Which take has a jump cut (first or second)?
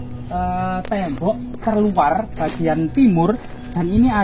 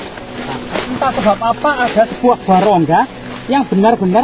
second